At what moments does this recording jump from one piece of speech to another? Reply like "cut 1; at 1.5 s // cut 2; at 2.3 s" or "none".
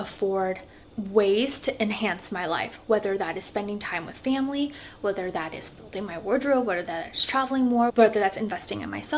cut 1; at 7.9 s